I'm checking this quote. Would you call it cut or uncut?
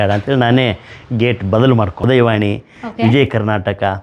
cut